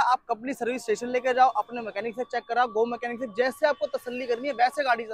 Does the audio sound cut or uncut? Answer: uncut